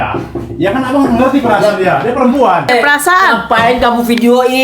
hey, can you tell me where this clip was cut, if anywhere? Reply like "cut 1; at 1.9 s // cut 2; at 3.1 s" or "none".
cut 1; at 2.7 s